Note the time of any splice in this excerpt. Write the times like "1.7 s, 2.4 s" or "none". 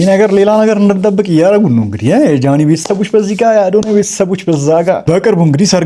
none